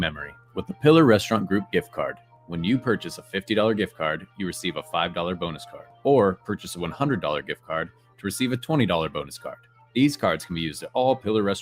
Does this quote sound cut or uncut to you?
uncut